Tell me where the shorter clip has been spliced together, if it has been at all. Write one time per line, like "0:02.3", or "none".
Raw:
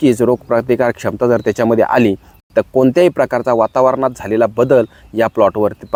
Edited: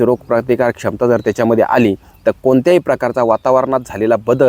0:02.1